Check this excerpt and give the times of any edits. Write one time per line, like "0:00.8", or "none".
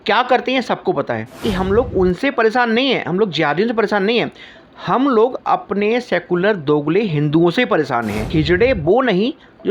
0:01.4
0:08.3